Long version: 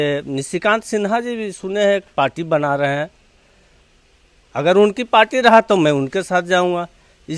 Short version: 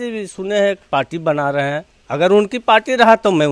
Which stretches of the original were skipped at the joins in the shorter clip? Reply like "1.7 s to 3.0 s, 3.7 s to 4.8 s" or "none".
3.2 s to 4.4 s

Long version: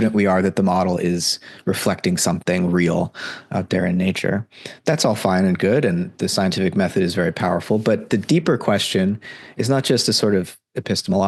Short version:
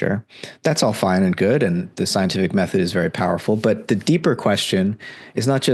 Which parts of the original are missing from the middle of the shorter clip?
none

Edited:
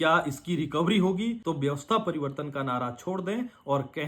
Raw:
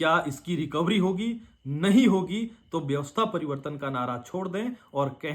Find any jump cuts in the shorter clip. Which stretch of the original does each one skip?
1.4 s to 2.7 s

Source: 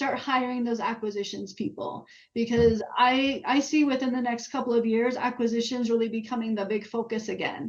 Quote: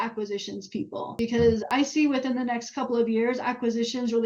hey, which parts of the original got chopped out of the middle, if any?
2.0 s to 2.3 s, 2.8 s to 3.4 s

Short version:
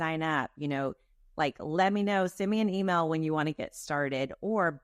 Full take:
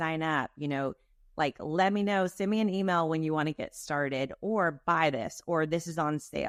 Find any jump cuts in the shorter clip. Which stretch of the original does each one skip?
none

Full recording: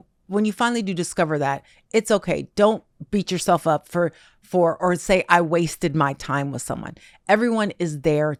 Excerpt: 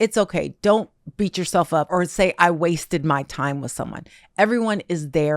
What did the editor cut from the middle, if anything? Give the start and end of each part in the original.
3.8 s to 4.8 s

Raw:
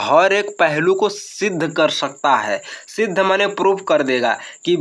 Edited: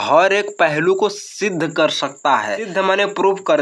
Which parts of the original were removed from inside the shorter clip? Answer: 2.2 s to 2.6 s

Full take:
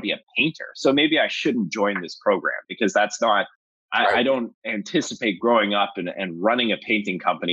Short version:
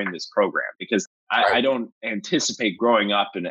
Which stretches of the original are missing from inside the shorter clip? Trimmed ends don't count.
2.9 s to 3.6 s

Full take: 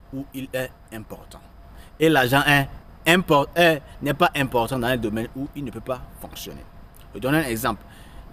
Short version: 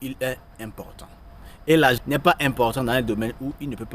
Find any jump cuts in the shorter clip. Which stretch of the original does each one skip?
2.3 s to 3.9 s

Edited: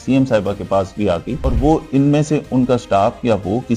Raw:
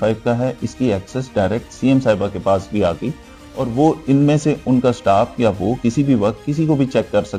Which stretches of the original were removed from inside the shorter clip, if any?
3.1 s to 3.5 s

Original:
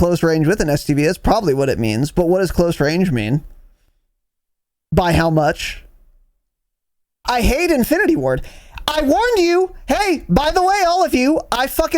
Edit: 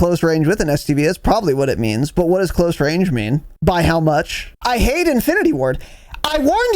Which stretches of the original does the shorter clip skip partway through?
3.5 s to 4.8 s, 5.7 s to 7.1 s

